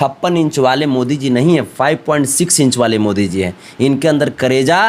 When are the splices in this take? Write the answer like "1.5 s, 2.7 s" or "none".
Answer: none